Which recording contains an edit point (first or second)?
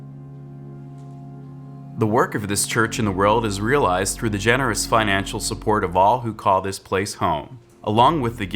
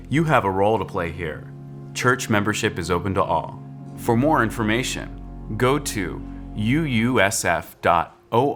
first